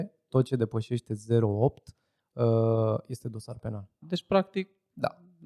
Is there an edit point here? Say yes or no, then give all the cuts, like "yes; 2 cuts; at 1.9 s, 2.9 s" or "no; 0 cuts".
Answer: yes; 1 cut; at 4.0 s